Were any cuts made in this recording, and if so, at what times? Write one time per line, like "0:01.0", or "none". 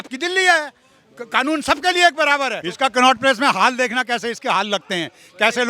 0:02.6